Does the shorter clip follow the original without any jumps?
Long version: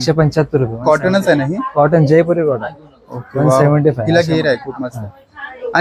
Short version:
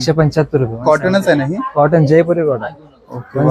yes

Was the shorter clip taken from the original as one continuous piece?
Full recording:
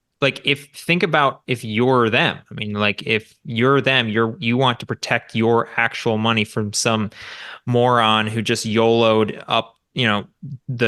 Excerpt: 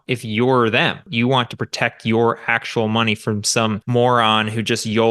no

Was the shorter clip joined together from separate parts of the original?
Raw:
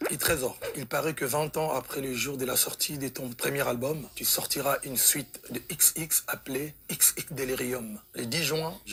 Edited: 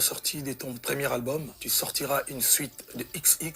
no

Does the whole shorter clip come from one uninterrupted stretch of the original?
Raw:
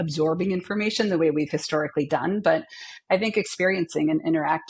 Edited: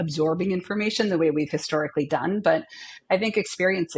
yes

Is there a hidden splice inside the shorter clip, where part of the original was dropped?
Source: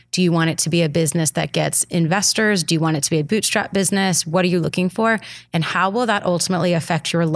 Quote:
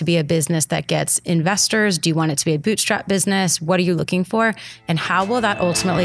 no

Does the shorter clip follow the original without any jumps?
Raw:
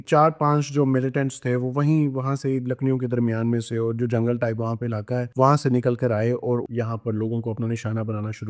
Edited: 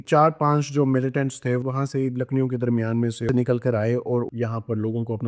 no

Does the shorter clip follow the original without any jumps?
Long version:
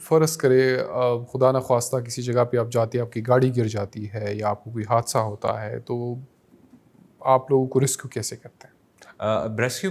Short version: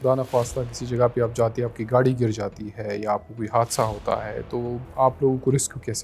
no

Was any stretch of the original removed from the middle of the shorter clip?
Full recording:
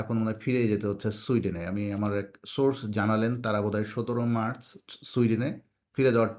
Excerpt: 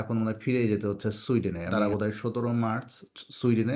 yes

